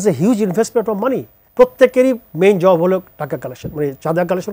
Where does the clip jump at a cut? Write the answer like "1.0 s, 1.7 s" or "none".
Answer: 1.4 s